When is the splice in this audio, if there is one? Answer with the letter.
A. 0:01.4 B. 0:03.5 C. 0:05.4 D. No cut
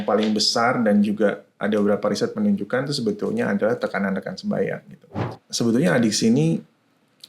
C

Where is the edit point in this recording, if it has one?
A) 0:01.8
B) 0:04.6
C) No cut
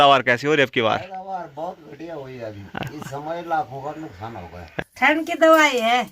B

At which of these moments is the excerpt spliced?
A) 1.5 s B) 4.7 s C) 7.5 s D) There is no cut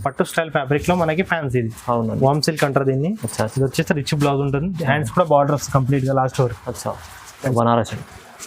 C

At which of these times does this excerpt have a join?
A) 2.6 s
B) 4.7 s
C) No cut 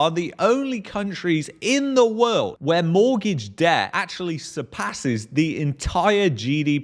A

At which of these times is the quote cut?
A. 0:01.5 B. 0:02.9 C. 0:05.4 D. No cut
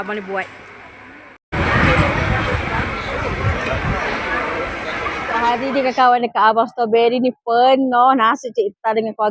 C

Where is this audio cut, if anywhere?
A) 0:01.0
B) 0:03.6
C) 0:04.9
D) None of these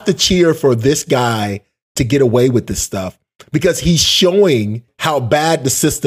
C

